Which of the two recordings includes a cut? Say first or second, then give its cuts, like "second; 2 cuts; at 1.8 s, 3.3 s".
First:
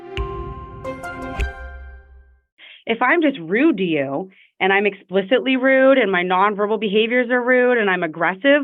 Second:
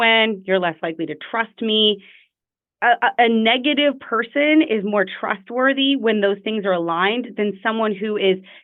first; 1 cut; at 2.5 s